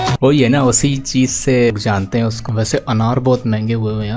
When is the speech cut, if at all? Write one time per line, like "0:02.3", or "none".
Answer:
0:01.7

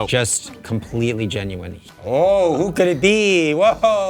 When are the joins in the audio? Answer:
0:02.0

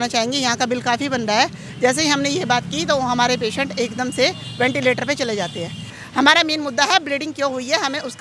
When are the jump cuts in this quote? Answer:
0:05.9

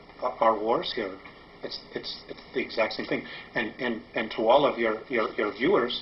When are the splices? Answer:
0:02.2

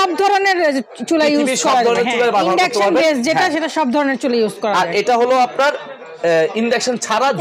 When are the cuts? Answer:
none

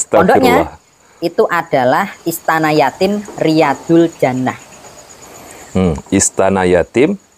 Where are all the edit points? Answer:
none

